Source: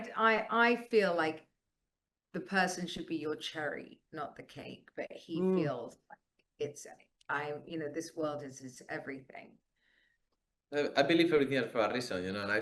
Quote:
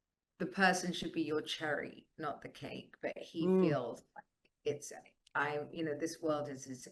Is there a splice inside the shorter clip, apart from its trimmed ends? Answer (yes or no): no